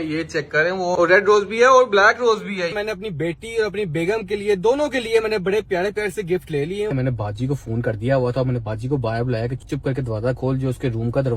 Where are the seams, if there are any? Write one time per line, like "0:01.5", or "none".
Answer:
0:00.9
0:02.7
0:06.9